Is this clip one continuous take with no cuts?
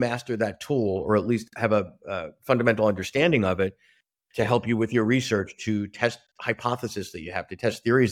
yes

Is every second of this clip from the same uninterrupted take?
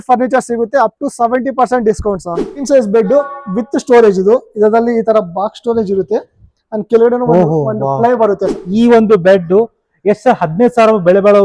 no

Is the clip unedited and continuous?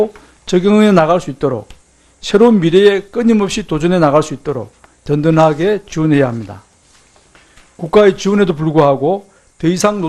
no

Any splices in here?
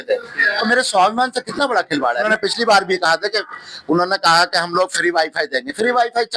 yes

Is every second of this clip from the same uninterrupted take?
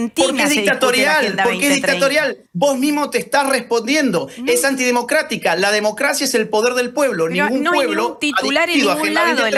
yes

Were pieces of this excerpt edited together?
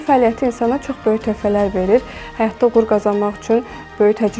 no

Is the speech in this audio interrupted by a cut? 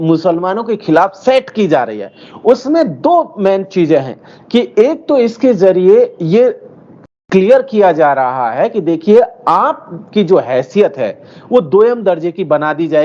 no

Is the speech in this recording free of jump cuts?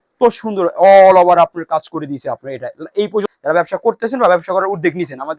no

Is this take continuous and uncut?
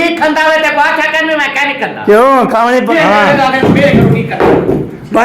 no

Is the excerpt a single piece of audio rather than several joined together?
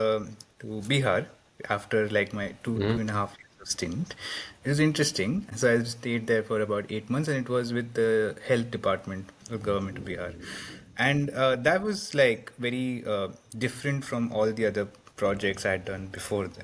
yes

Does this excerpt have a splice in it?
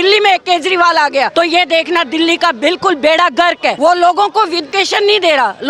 yes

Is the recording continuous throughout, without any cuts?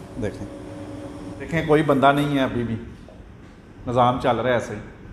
no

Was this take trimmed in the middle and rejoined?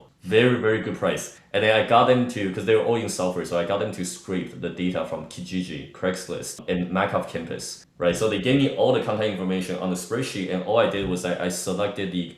no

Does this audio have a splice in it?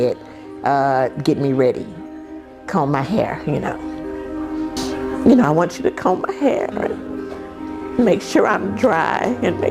yes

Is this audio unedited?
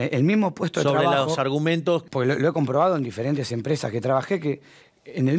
no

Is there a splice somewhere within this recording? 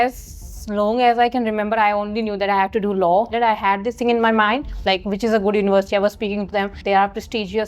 yes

